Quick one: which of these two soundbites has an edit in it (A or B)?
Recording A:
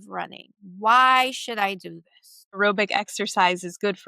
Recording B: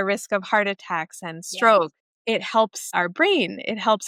A